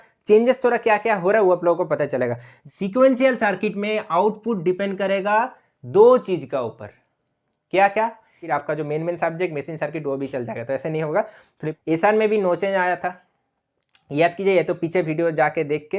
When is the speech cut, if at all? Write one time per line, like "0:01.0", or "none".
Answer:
0:02.5
0:08.4
0:11.6